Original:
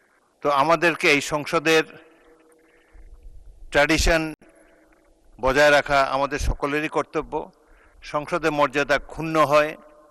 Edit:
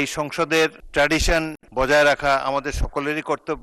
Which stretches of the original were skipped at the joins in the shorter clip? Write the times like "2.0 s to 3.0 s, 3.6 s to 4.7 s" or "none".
2.0 s to 3.6 s, 4.4 s to 5.3 s

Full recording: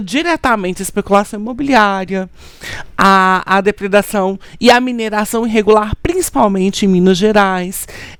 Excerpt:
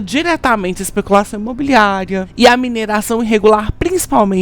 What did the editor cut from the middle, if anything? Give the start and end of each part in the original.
2.3 s to 4.5 s

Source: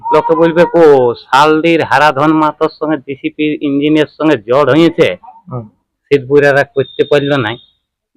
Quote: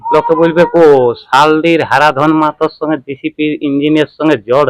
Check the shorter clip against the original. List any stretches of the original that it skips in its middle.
none

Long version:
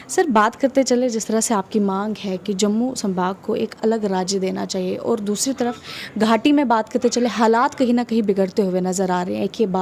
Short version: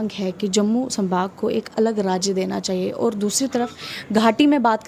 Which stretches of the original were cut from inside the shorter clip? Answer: none

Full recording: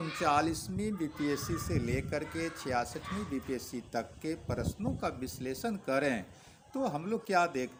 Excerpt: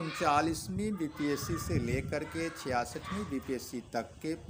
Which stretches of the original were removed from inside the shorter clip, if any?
none

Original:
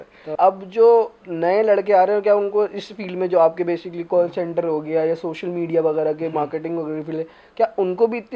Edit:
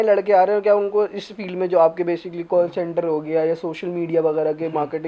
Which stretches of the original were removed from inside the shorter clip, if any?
none

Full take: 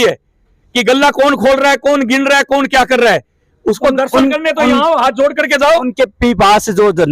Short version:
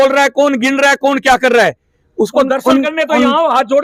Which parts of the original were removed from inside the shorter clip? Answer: none

